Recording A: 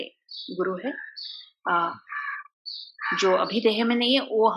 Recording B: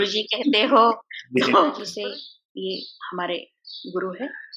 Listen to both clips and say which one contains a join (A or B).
B